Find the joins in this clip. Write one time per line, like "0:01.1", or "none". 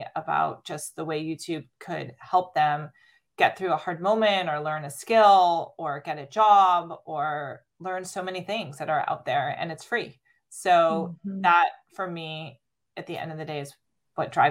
0:01.7
0:07.7